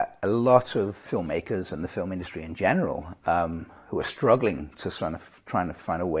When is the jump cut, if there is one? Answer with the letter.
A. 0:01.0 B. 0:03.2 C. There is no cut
A